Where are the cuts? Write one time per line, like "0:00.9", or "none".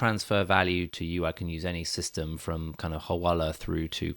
0:00.9